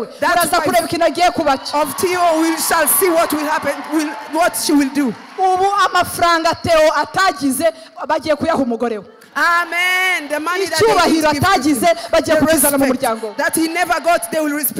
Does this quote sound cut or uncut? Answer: uncut